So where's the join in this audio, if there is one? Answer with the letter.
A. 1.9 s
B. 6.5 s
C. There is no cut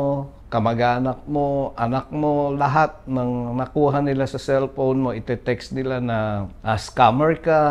B